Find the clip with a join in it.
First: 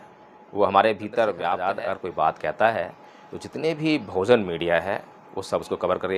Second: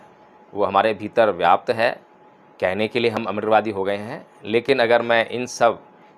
first; 1 cut; at 1.5 s

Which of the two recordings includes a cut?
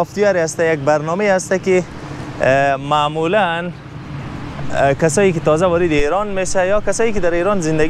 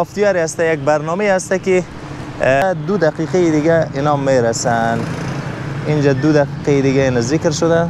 second; 1 cut; at 2.6 s

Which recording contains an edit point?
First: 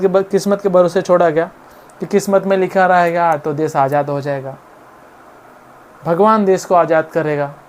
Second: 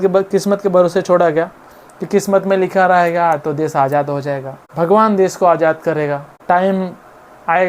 second; 2 cuts; at 4.6 s, 6.3 s

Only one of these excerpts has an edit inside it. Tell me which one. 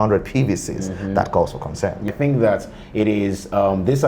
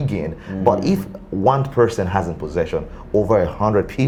first; 1 cut; at 2.0 s

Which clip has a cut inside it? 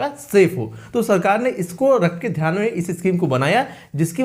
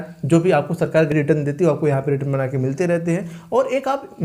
second; 1 cut; at 1.1 s

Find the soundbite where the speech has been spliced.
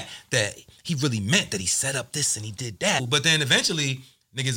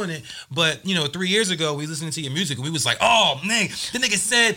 first; 1 cut; at 3.1 s

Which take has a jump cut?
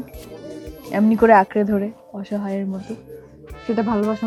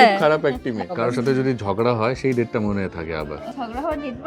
second; 2 cuts; at 0.9 s, 3.4 s

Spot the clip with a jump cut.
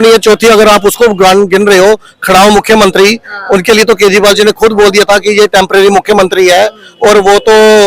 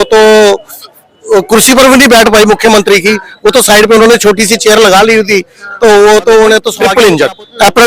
second; 1 cut; at 6.8 s

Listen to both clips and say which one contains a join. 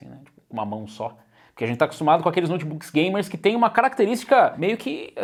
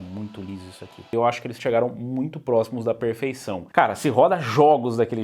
second; 2 cuts; at 1.0 s, 3.6 s

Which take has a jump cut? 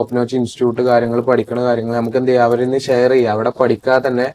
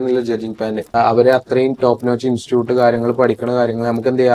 second; 1 cut; at 0.9 s

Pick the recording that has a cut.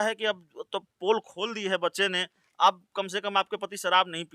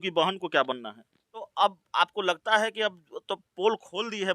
second; 1 cut; at 1.5 s

